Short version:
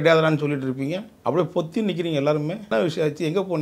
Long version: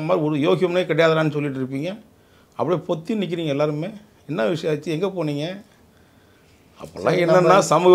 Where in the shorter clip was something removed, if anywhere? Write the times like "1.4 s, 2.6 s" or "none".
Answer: 1.1 s, 2.6 s